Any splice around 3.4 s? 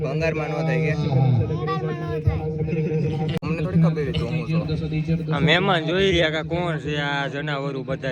yes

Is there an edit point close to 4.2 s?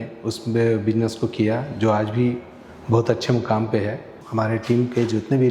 yes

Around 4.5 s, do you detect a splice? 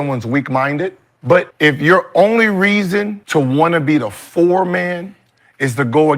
no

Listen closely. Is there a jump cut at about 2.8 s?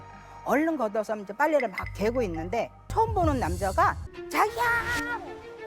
yes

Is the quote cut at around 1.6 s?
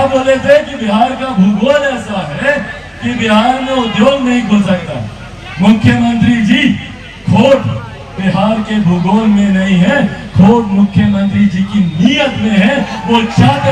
no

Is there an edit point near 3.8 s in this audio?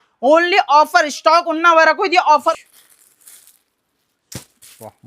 no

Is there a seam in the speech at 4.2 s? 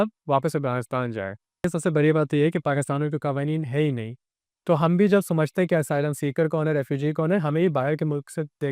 no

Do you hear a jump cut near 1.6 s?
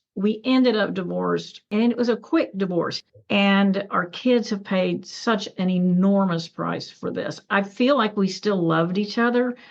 yes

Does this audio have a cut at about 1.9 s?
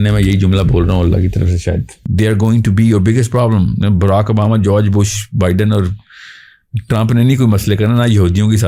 yes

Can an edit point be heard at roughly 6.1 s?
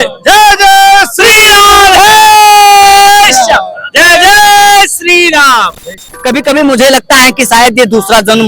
yes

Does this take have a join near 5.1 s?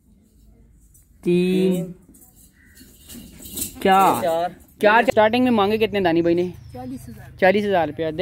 yes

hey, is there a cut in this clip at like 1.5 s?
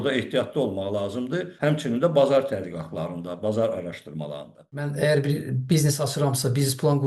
yes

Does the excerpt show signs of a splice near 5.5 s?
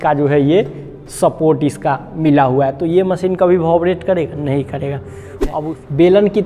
yes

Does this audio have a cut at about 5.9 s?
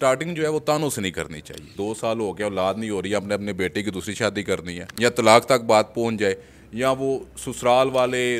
no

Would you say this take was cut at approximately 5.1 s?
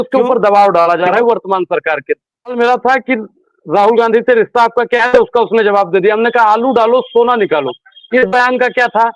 no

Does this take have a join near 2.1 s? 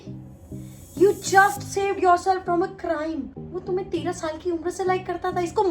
no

